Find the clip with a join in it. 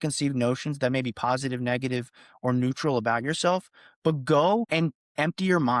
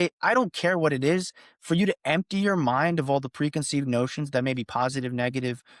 first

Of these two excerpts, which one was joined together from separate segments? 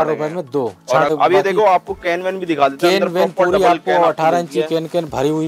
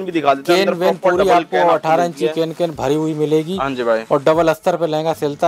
first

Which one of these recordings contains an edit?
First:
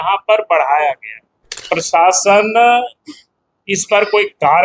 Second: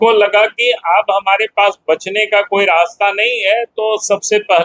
first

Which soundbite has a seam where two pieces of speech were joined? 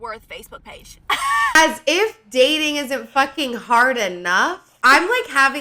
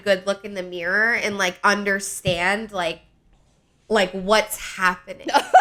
first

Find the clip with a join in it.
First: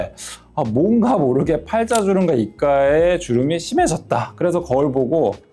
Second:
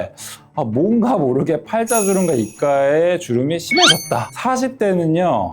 second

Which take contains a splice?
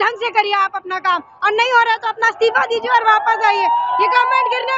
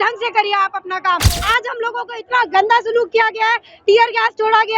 second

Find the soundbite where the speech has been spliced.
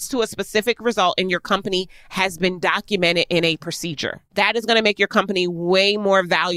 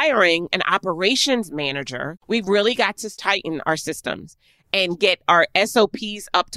second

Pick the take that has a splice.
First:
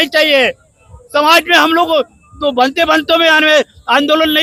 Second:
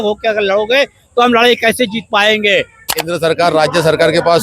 second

